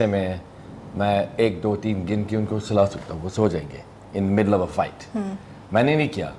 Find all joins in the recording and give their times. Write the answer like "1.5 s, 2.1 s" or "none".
none